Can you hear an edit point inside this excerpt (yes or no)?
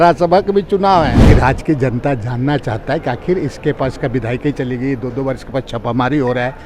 yes